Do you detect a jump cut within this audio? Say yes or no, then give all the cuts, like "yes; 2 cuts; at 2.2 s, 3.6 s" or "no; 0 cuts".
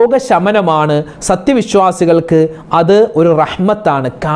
no; 0 cuts